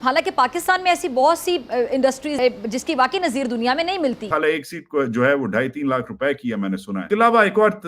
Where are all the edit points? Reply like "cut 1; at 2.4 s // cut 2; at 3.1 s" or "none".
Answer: cut 1; at 2.4 s // cut 2; at 4.3 s